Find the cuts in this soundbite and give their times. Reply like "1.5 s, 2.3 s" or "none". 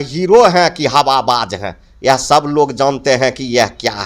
none